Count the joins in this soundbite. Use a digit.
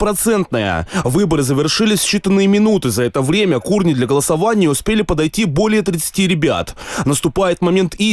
1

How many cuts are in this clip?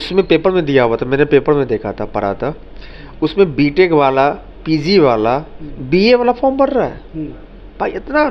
0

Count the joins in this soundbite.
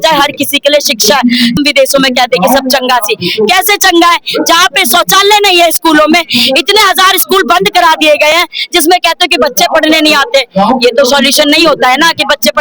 1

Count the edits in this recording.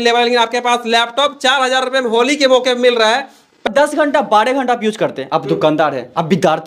1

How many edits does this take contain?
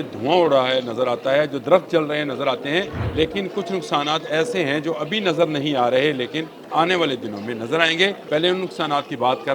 3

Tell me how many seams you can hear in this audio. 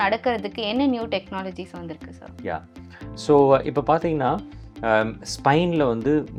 0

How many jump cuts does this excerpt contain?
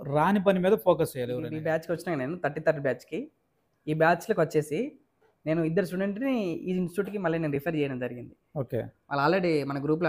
1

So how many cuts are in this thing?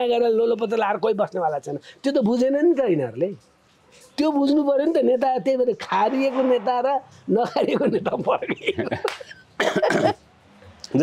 0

